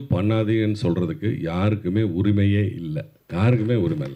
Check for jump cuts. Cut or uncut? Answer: cut